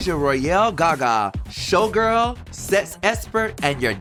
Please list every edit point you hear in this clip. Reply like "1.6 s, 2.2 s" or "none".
none